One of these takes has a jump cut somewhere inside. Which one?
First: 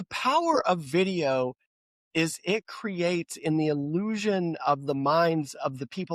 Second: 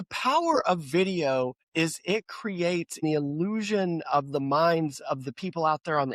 second; 2 cuts; at 1.6 s, 3.0 s

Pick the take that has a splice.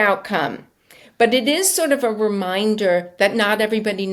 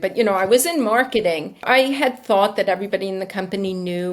second; 1 cut; at 1.6 s

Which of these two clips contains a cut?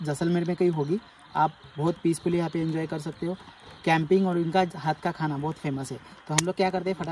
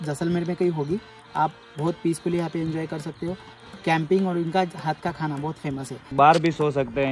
second; 1 cut; at 6.1 s

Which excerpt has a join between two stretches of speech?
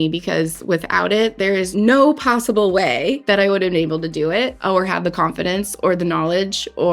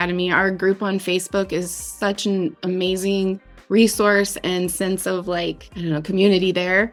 first; 3 cuts; at 1.7 s, 3.2 s, 4.6 s

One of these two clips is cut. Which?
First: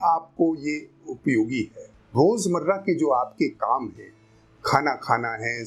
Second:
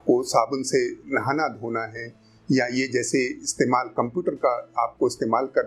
first; 1 cut; at 2.1 s

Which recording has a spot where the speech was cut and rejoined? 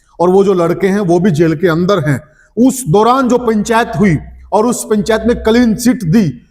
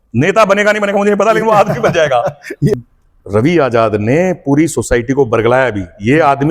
second; 1 cut; at 2.7 s

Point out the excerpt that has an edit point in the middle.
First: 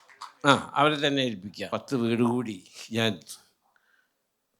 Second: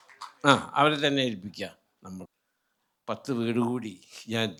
first; 1 cut; at 1.5 s

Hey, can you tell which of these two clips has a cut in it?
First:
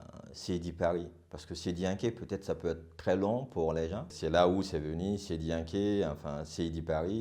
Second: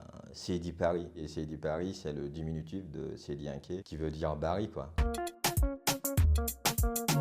second; 1 cut; at 1.3 s

